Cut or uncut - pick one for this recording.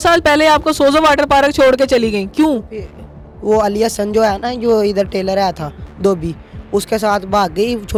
uncut